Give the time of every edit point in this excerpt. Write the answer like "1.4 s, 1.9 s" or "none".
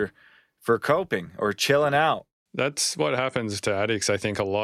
2.4 s